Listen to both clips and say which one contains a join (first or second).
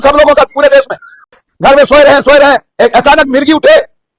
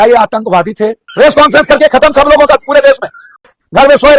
second